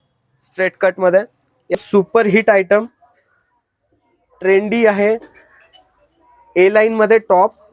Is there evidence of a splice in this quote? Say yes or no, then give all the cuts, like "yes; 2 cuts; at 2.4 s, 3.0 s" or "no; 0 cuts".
yes; 1 cut; at 1.7 s